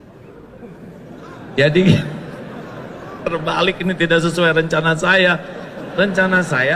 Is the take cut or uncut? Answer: uncut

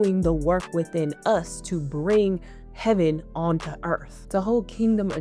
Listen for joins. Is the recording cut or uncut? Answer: cut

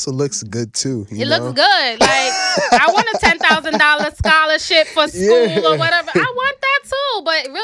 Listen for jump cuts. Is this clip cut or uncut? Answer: uncut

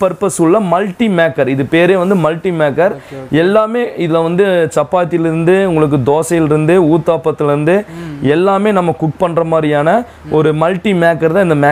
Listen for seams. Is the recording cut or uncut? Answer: uncut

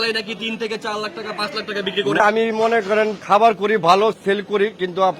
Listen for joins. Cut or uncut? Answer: cut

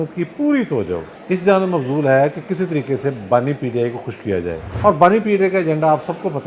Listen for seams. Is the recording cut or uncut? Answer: cut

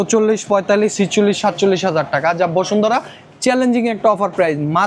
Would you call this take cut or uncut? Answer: uncut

